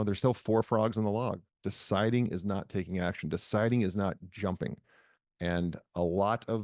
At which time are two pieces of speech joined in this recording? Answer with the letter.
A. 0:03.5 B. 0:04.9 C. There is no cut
C